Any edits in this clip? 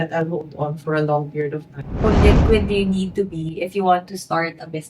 yes; 1 cut; at 2.0 s

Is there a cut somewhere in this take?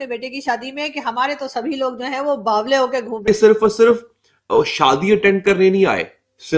yes; 1 cut; at 3.2 s

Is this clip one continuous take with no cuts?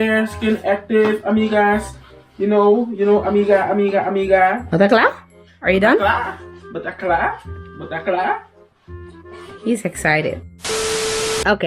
no; 2 cuts; at 4.6 s, 10.6 s

